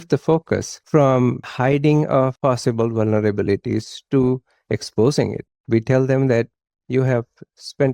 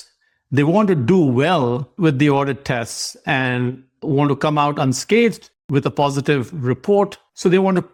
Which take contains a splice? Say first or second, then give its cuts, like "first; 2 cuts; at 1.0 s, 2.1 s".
first; 1 cut; at 5.5 s